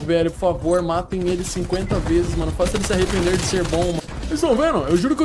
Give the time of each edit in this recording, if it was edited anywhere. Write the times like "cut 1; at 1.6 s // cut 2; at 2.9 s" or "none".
cut 1; at 4.0 s